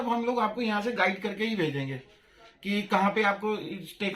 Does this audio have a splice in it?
no; 0 cuts

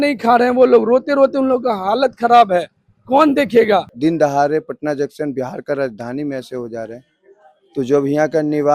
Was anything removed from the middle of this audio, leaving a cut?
yes; 1 cut; at 3.9 s

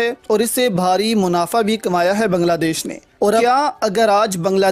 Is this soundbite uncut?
no; 1 cut; at 3.4 s

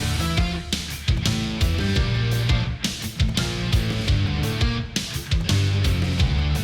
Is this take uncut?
yes; 0 cuts

